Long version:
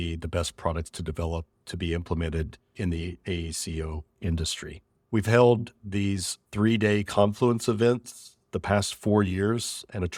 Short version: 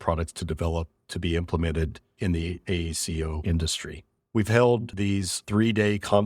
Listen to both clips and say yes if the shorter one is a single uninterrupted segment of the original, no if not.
no